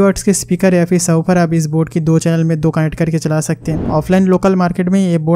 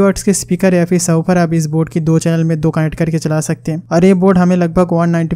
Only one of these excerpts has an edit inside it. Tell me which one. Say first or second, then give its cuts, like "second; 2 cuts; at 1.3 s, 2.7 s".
first; 1 cut; at 3.8 s